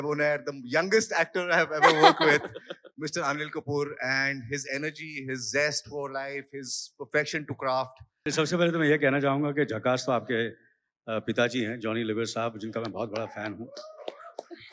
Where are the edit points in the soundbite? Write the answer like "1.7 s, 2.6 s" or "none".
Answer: 8.2 s

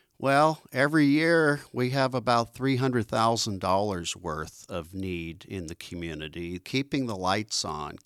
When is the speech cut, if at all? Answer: 6.6 s

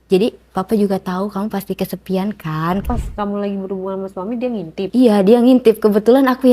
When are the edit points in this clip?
2.8 s, 4.9 s

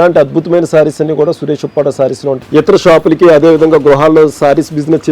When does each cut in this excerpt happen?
2.4 s

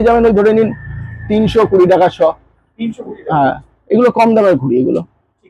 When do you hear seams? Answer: none

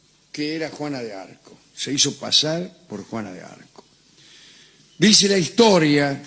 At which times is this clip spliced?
3.1 s

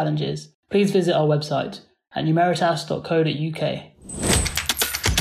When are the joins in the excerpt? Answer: 3.9 s

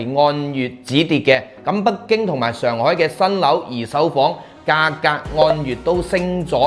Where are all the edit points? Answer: none

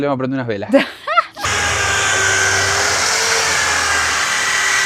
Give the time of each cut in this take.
none

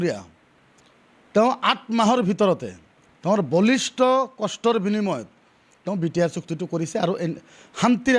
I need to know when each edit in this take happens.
none

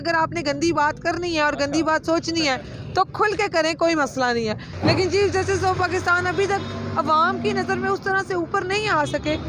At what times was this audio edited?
4.7 s

